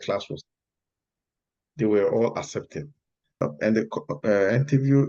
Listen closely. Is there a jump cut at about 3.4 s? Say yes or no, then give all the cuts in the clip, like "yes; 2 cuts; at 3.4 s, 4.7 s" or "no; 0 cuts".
yes; 1 cut; at 3.4 s